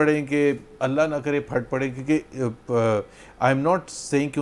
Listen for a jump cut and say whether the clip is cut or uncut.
uncut